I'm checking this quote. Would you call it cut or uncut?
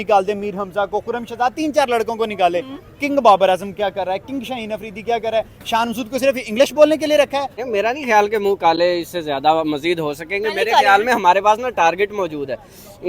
cut